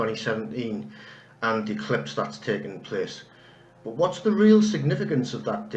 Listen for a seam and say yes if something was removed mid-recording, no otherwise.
yes